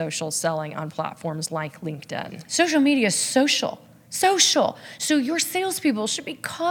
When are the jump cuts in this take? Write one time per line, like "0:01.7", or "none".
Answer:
0:02.4

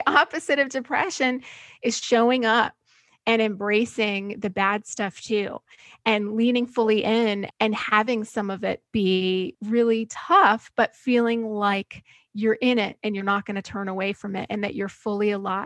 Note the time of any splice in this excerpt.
0:07.5
0:09.6

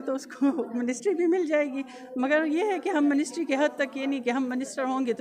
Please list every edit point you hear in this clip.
none

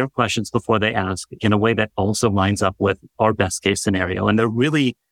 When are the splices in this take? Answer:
0:03.1

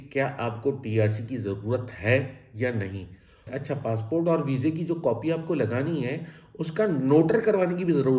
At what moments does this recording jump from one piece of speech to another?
0:03.5

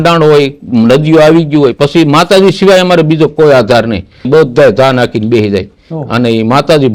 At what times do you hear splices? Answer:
0:04.3

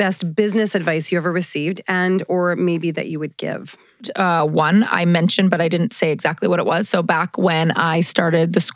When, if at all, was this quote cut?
0:04.1

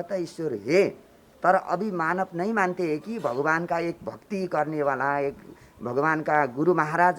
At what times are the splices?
none

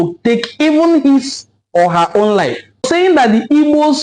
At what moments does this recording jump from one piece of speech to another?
0:02.9

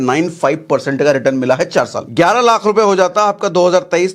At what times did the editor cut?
0:02.0

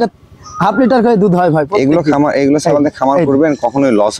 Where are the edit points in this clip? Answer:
none

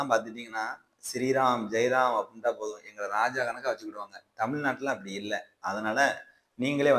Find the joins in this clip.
none

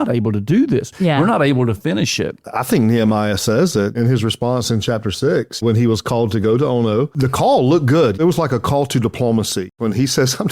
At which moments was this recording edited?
0:02.5
0:03.9
0:05.6
0:07.1
0:08.2
0:09.7

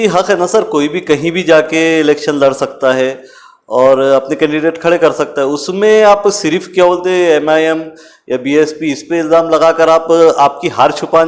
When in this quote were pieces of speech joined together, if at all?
none

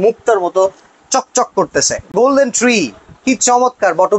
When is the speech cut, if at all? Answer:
0:02.1

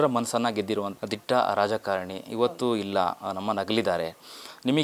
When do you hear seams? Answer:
0:00.9

